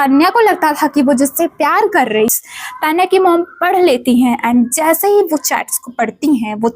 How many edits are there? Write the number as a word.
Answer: one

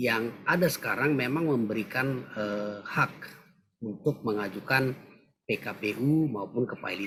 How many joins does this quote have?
zero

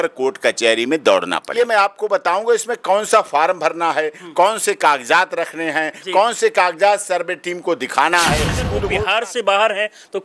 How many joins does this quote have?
two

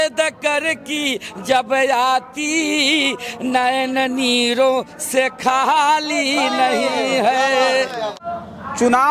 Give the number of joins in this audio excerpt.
one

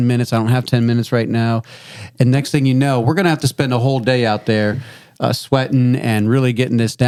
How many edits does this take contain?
zero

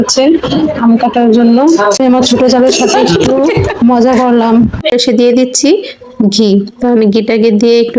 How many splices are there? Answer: two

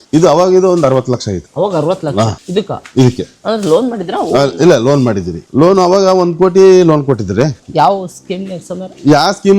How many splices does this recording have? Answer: zero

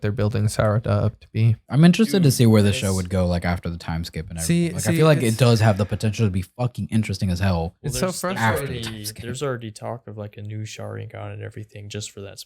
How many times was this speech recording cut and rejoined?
one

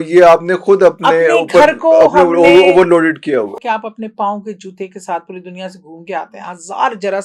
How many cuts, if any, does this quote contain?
one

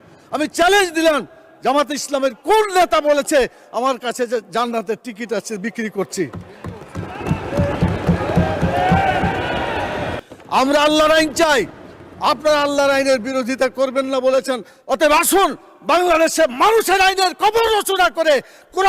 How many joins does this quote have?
one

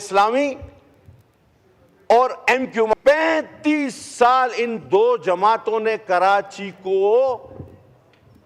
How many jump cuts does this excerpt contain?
one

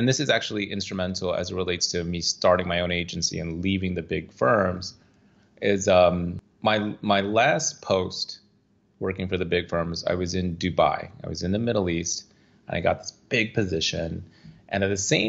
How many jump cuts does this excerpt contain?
one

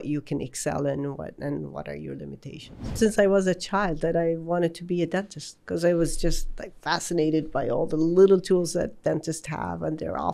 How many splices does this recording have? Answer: one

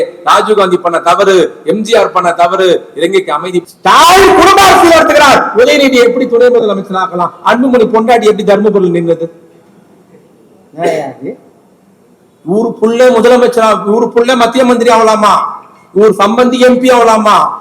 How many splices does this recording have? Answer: one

